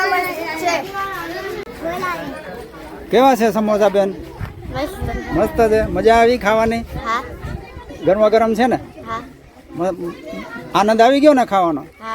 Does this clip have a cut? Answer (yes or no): yes